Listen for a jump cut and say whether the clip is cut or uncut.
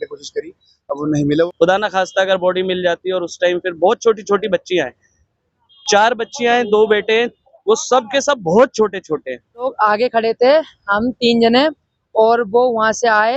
cut